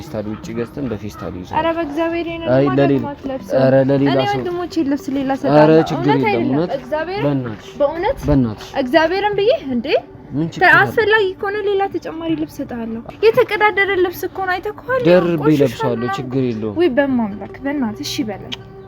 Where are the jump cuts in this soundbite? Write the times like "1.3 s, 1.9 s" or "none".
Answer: 13.0 s